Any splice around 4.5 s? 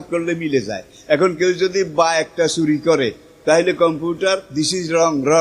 yes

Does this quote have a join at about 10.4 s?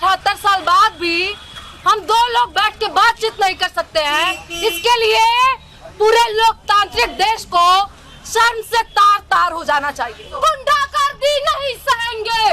yes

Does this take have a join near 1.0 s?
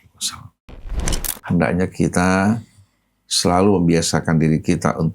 yes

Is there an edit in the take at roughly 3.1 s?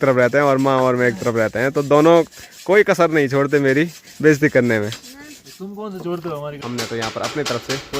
no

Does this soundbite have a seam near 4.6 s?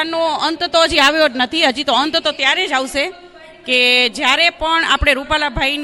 yes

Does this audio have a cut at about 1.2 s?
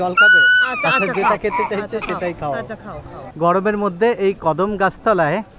no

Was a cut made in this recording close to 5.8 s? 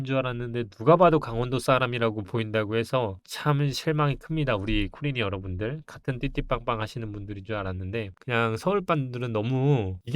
no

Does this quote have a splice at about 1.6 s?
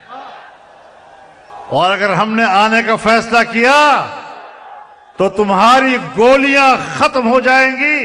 yes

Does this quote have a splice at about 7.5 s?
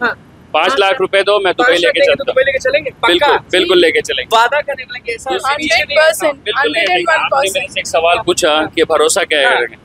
no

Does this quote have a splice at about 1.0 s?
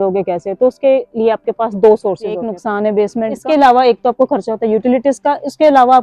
no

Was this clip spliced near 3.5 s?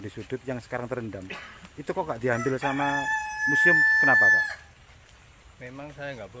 no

